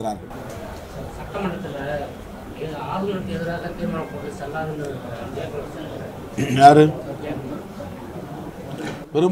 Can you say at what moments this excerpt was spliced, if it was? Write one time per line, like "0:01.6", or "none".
none